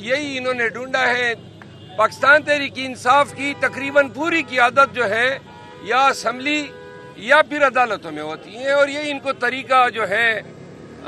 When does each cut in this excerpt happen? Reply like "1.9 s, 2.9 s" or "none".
none